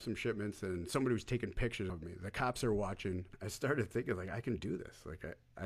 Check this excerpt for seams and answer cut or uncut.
cut